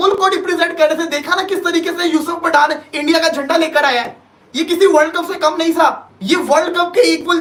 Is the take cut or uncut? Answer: uncut